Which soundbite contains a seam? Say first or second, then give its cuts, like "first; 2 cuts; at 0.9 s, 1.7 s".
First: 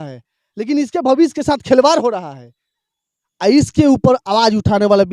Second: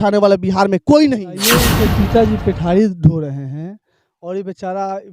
second; 1 cut; at 1.7 s